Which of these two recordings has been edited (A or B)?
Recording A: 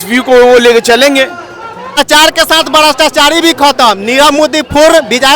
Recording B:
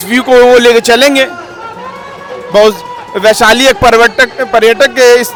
A